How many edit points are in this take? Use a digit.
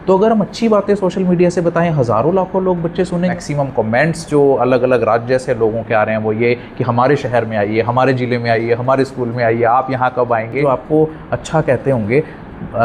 2